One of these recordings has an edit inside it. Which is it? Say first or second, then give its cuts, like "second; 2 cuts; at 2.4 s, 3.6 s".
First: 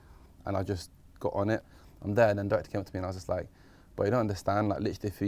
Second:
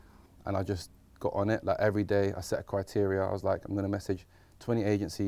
first; 1 cut; at 1.6 s